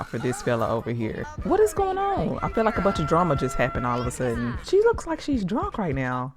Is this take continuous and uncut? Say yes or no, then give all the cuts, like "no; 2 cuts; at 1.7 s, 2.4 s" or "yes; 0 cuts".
no; 2 cuts; at 1.3 s, 4.6 s